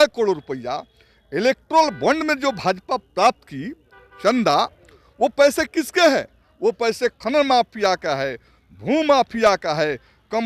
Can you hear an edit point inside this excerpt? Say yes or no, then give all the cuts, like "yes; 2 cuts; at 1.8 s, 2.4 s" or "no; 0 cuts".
no; 0 cuts